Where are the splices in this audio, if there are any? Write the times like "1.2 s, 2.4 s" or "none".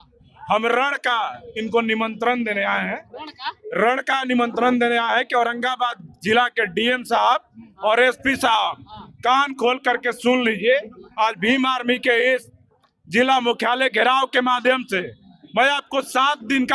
none